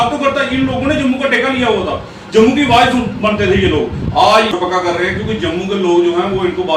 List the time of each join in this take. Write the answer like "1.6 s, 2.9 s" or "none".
4.5 s